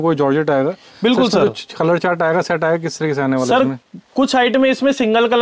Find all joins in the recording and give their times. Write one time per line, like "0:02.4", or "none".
none